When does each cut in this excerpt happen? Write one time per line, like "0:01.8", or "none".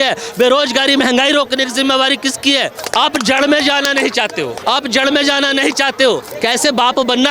0:02.8
0:04.6
0:06.3